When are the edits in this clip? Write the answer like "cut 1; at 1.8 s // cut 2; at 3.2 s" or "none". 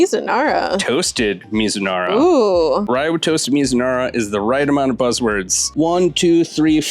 cut 1; at 5.7 s

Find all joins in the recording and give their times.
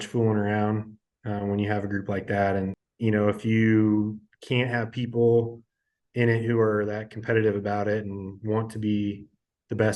cut 1; at 2.8 s

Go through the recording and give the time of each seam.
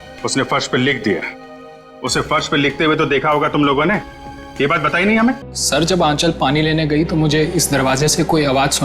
cut 1; at 5.5 s

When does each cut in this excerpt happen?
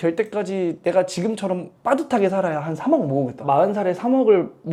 none

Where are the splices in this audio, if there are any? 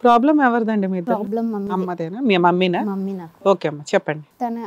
none

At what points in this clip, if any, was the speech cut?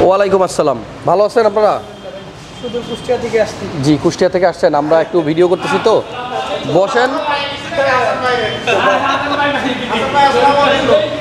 none

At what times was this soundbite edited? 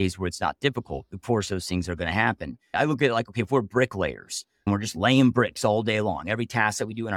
cut 1; at 2.6 s // cut 2; at 4.7 s

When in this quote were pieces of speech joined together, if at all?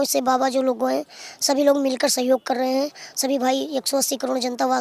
none

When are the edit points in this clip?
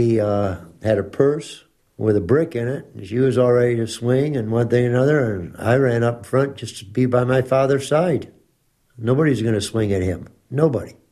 none

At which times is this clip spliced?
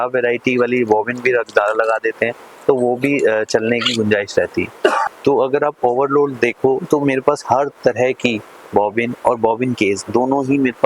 cut 1; at 5.0 s

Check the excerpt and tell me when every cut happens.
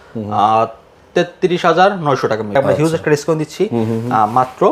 cut 1; at 2.6 s

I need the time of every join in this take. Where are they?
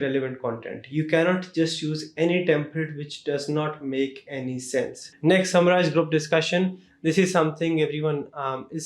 cut 1; at 5.0 s

